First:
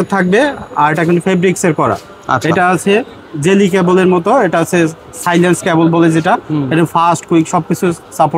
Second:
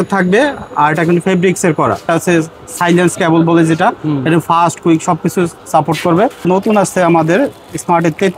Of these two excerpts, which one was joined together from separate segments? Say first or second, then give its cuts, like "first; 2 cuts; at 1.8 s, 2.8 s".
second; 2 cuts; at 2.1 s, 6.5 s